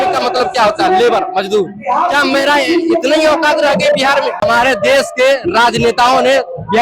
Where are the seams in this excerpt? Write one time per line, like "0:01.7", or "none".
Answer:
0:04.4